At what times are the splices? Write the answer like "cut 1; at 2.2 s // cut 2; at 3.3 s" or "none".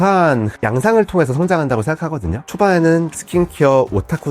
cut 1; at 2.4 s